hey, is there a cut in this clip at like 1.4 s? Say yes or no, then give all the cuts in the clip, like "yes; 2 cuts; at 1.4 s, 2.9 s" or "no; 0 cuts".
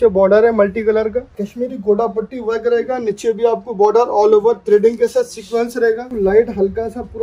yes; 2 cuts; at 1.4 s, 6.1 s